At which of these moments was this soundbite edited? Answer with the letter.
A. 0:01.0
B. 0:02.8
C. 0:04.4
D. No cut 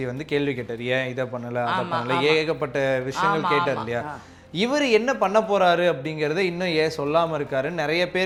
D